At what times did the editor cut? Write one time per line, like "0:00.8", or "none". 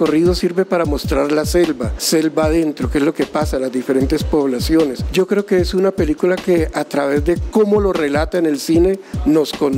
0:01.9
0:05.0